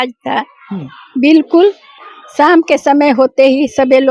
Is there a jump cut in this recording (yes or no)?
no